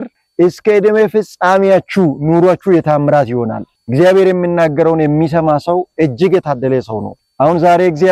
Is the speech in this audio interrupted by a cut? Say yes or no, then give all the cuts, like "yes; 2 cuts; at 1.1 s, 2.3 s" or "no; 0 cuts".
no; 0 cuts